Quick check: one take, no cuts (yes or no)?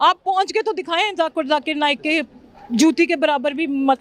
yes